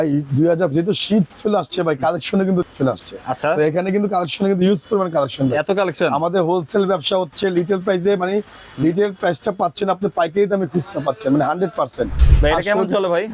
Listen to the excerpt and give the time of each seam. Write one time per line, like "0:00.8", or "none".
0:01.3
0:02.7
0:12.2

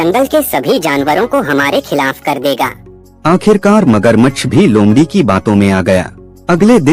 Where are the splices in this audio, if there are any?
none

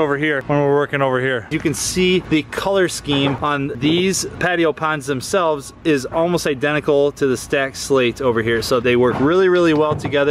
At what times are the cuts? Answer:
0:01.5

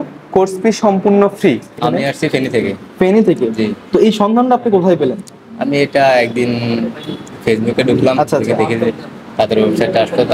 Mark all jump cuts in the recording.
0:01.8

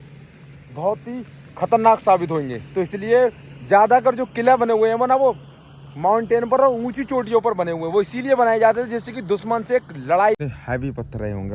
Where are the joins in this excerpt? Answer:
0:10.4

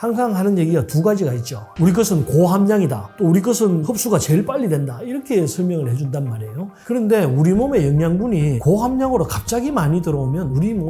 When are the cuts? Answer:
0:01.7

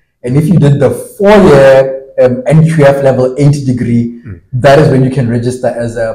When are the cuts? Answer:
none

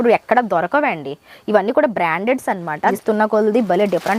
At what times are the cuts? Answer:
0:02.9

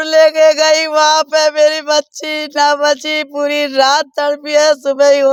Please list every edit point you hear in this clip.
none

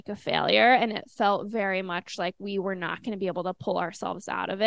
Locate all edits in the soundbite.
none

